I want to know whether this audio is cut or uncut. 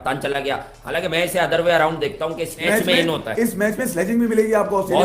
cut